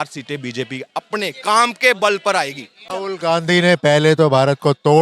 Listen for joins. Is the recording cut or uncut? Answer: cut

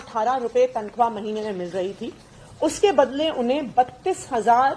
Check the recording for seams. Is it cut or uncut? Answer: uncut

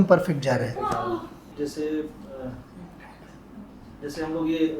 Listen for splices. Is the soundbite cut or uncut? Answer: cut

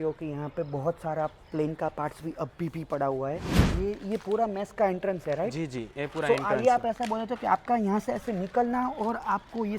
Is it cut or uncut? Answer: cut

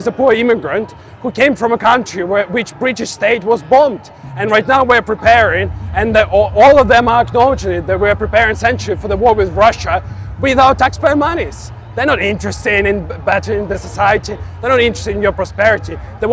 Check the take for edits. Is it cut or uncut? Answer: uncut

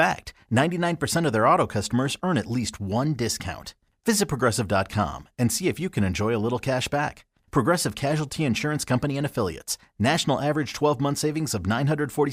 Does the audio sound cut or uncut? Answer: uncut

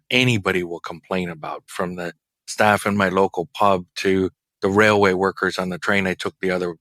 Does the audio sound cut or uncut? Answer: uncut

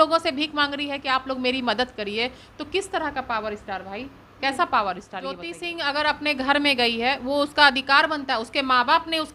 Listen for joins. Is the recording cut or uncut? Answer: cut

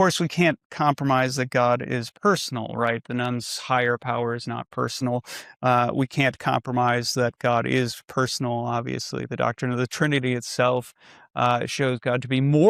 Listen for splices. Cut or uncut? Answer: uncut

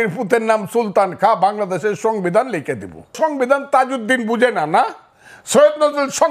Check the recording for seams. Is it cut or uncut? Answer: cut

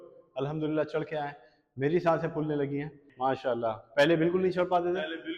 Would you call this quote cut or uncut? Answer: cut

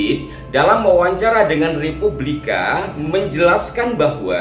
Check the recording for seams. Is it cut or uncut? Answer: cut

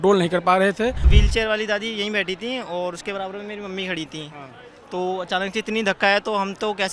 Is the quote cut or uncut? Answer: cut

